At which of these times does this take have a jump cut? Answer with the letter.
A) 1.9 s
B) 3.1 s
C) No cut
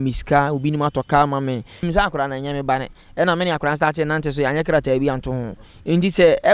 A